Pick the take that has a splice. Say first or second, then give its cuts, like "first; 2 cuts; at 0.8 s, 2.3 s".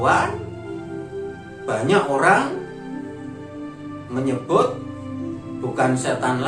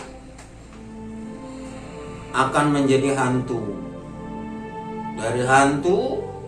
first; 2 cuts; at 2.9 s, 4.0 s